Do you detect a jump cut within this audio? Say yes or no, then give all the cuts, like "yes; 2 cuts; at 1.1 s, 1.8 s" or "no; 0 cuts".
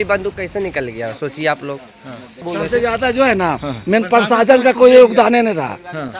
yes; 1 cut; at 2.4 s